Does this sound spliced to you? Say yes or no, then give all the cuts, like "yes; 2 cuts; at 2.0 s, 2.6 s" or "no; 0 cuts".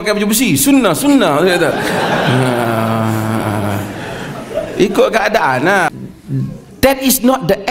yes; 1 cut; at 5.9 s